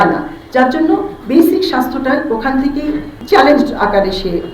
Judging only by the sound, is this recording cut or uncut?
cut